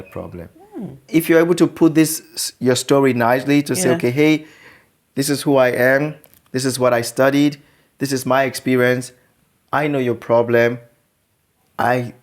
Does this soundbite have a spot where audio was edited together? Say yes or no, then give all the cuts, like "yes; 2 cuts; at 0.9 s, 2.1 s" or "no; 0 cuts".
yes; 1 cut; at 1.1 s